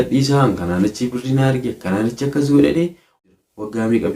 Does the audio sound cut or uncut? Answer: cut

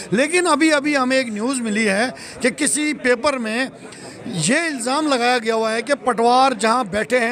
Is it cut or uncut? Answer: uncut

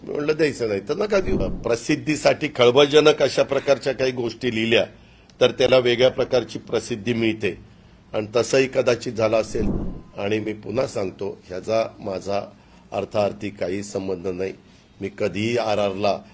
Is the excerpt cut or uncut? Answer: cut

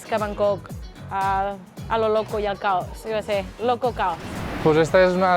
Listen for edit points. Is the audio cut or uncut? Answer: cut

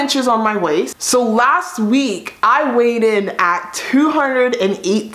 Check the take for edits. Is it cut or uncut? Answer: cut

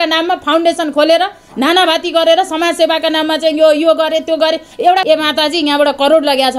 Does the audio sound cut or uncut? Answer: cut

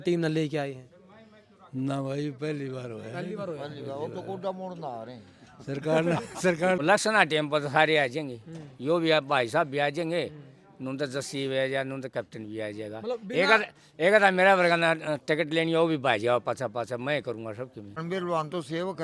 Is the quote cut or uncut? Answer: cut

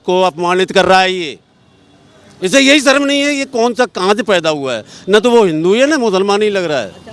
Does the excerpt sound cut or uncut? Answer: uncut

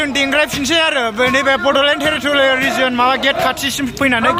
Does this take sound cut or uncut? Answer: uncut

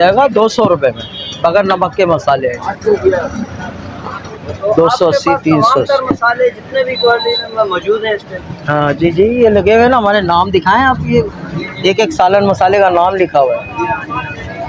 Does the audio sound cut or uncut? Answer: uncut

